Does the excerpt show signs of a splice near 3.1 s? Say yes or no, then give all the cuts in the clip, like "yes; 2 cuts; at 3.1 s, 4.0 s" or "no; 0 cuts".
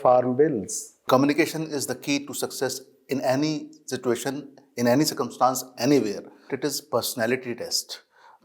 no; 2 cuts; at 1.1 s, 6.5 s